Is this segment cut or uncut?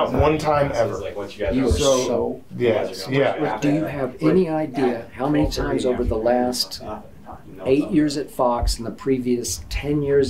cut